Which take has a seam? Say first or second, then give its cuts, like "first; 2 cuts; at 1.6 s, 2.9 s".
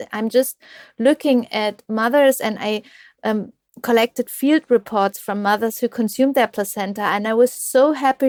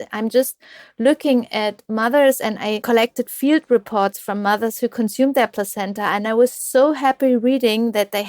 second; 1 cut; at 2.8 s